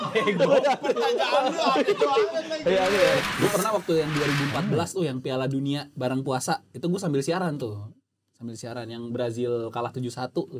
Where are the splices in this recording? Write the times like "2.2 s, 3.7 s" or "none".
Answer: 3.3 s